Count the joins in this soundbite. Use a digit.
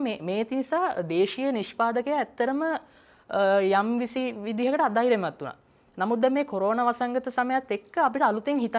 0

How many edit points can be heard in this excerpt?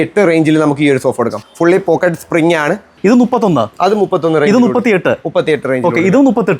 2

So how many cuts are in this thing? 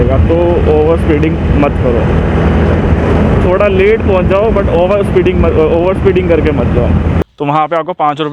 1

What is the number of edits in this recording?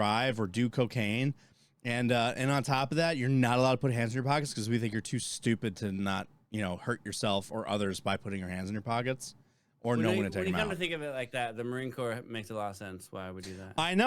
0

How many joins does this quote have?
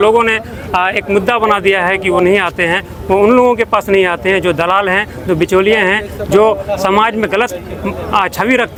0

